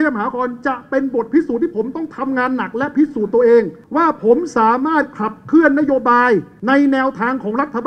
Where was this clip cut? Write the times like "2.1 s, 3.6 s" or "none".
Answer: 3.8 s, 6.5 s